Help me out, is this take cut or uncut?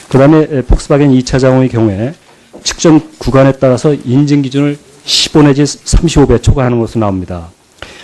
cut